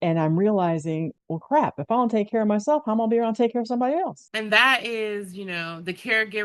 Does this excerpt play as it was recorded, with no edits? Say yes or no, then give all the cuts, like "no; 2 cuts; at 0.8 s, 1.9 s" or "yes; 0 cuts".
yes; 0 cuts